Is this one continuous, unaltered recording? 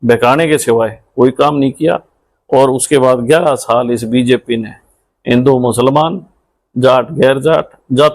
yes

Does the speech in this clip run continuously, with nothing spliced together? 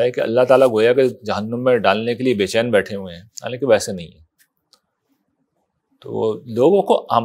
yes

